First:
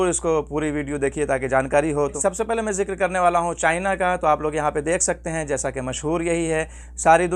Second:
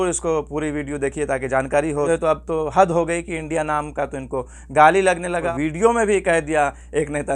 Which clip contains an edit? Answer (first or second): second